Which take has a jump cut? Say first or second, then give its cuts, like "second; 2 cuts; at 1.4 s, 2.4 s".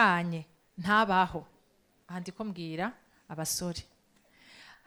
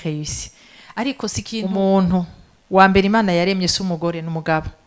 second; 1 cut; at 1.6 s